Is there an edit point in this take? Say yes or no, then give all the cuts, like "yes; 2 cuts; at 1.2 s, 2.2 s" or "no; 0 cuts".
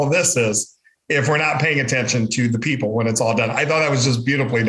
no; 0 cuts